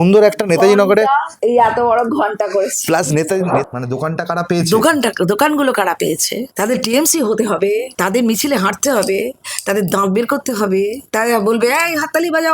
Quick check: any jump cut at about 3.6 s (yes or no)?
yes